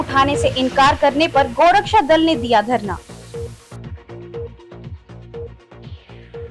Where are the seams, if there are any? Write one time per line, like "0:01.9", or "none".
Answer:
none